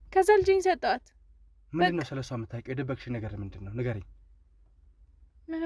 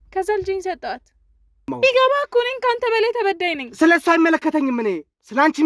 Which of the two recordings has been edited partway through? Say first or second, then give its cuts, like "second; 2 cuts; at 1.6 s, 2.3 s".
second; 1 cut; at 1.7 s